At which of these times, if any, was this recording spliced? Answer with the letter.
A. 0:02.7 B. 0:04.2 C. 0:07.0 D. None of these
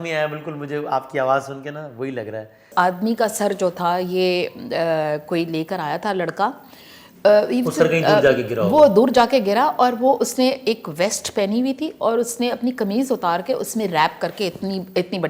A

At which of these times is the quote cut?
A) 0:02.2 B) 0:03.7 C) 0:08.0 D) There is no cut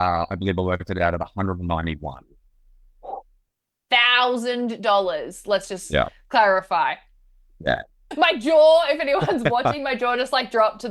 C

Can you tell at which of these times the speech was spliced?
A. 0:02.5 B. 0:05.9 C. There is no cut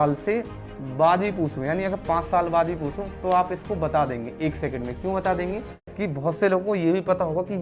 B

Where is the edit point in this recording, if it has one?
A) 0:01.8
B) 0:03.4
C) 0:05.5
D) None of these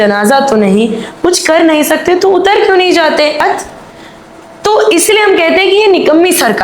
B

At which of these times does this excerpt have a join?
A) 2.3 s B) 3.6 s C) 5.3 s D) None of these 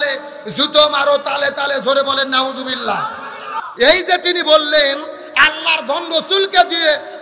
B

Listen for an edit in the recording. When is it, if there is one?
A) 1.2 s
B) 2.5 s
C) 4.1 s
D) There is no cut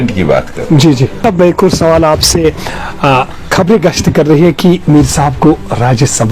A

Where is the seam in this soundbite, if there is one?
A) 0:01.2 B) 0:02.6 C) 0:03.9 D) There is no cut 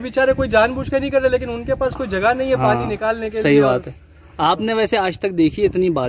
D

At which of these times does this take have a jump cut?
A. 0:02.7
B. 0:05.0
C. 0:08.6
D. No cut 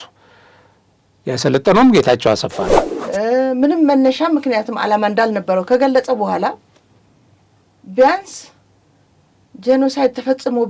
A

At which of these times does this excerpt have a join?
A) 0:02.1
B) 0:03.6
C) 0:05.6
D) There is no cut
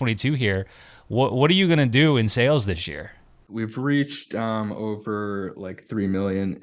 B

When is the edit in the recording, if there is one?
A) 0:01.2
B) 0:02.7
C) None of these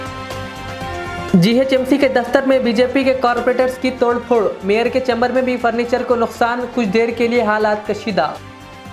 A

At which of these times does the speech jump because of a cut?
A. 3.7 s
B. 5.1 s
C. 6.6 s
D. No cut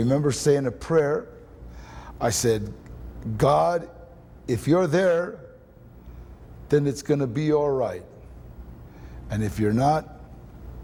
D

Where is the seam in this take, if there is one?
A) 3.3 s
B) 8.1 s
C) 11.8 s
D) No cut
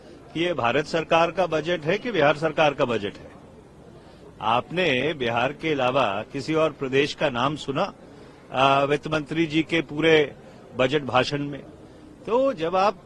D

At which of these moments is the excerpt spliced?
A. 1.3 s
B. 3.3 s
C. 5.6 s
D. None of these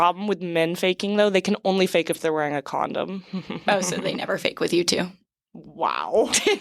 D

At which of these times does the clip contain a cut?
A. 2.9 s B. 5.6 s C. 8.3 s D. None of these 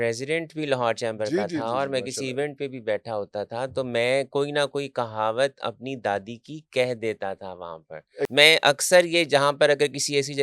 C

